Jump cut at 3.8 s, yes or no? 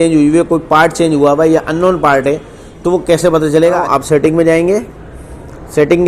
yes